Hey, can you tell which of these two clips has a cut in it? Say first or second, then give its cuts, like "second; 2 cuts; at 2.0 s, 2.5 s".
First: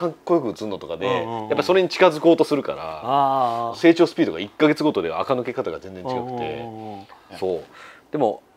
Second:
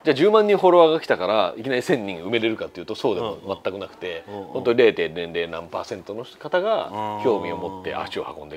first; 1 cut; at 7.2 s